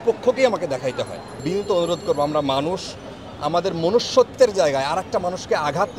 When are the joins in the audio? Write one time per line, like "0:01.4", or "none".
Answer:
0:01.4